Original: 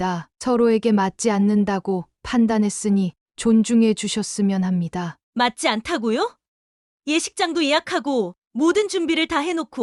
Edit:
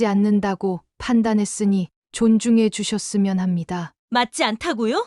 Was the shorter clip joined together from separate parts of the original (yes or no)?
no